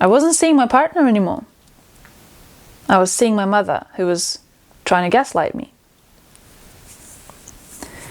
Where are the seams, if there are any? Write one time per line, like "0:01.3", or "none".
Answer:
none